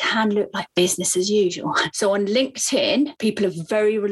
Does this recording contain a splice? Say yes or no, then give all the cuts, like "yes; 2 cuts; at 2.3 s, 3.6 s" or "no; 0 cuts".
yes; 1 cut; at 1.8 s